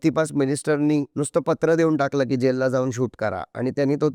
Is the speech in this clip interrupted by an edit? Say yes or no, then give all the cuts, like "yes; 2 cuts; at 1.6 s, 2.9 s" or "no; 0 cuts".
yes; 1 cut; at 1.1 s